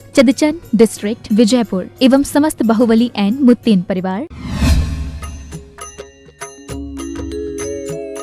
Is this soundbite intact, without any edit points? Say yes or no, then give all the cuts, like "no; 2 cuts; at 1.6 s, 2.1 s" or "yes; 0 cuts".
no; 1 cut; at 4.4 s